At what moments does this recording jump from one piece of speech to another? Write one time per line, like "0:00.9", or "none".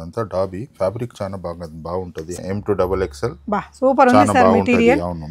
0:02.3